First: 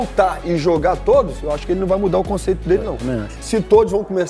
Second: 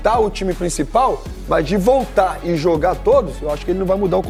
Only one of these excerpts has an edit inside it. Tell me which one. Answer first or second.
first